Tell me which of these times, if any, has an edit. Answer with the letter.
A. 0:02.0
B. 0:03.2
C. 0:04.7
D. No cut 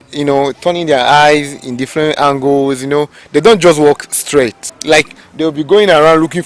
C